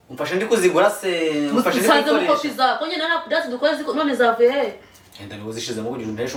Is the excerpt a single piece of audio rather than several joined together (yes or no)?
yes